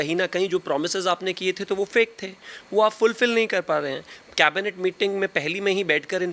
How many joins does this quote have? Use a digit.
0